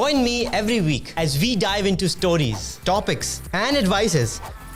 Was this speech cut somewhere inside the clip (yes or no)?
no